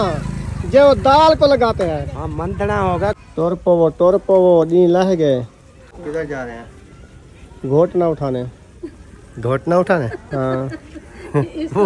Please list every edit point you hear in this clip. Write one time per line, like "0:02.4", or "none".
0:03.2
0:05.9